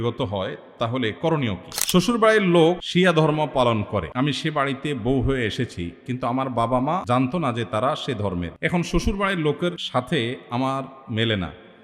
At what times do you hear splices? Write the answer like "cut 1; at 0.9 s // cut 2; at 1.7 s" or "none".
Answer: cut 1; at 1.7 s // cut 2; at 2.8 s // cut 3; at 4.1 s // cut 4; at 7.0 s // cut 5; at 8.5 s // cut 6; at 9.8 s

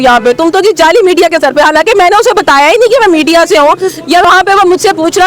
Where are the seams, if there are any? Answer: cut 1; at 4.3 s

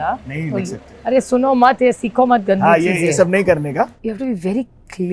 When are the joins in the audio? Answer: cut 1; at 4.0 s

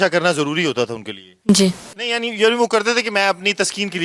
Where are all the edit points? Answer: cut 1; at 1.9 s

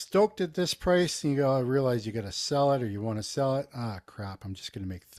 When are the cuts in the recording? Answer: none

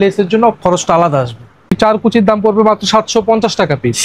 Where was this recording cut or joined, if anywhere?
cut 1; at 1.7 s

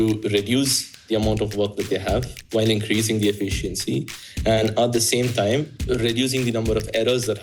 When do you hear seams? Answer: none

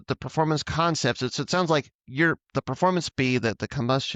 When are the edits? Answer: none

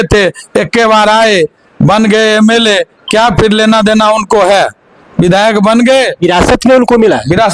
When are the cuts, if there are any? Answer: none

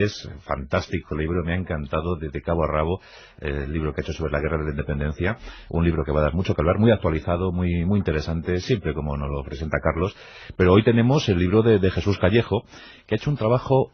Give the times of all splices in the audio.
none

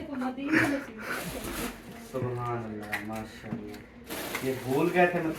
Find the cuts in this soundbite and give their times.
none

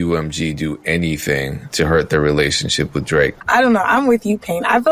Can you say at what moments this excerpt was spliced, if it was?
cut 1; at 3.4 s

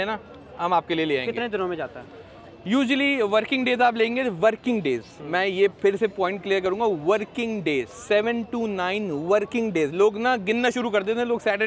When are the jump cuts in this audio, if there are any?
none

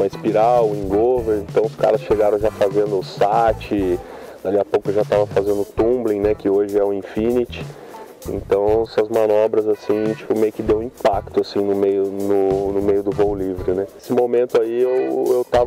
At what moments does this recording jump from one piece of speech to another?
cut 1; at 14.0 s

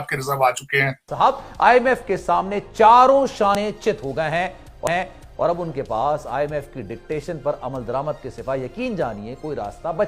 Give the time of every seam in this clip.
cut 1; at 1.0 s

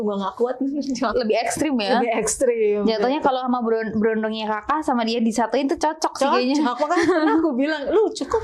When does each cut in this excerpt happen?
cut 1; at 1.1 s

